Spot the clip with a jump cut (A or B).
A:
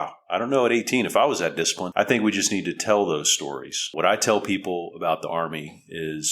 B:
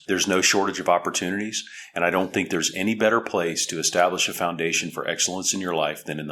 A